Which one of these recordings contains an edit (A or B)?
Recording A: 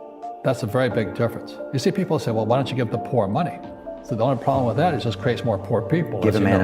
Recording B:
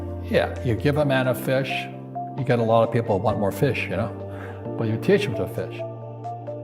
B